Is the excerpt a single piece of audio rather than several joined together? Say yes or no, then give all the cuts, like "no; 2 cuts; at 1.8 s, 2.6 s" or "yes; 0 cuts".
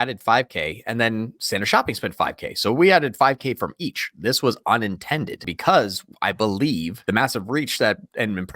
no; 2 cuts; at 5.5 s, 7.0 s